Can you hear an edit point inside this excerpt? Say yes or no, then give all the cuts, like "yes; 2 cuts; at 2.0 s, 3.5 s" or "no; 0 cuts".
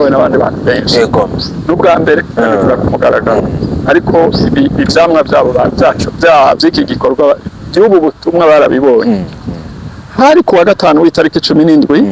no; 0 cuts